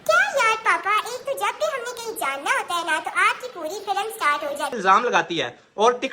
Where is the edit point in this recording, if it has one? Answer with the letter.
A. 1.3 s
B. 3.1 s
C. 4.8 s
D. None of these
C